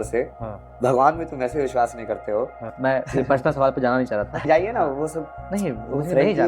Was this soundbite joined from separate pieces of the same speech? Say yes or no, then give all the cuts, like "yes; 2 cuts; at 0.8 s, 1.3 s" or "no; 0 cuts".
yes; 2 cuts; at 2.7 s, 4.5 s